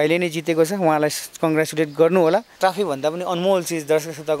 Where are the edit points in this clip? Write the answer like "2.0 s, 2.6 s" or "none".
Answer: 2.5 s